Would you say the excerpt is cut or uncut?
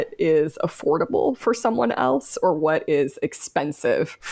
uncut